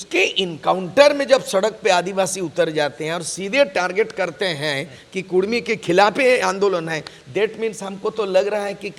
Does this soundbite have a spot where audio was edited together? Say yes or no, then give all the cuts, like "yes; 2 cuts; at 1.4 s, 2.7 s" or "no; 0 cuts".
no; 0 cuts